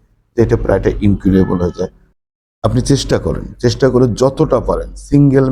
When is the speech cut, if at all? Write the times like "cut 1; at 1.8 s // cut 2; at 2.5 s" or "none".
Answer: cut 1; at 2.0 s